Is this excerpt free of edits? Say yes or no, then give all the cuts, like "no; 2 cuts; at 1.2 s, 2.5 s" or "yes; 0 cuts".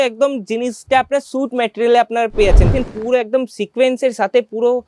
no; 1 cut; at 2.7 s